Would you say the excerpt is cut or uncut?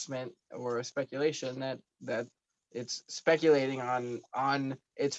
uncut